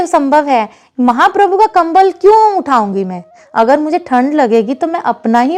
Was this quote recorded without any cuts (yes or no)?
yes